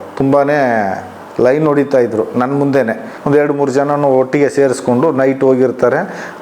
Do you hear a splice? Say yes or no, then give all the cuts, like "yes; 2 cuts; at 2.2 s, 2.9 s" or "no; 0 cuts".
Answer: yes; 1 cut; at 3.1 s